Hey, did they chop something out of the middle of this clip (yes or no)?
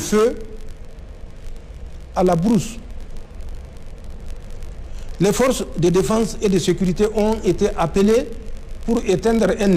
no